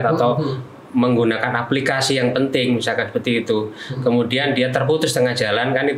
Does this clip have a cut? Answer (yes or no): no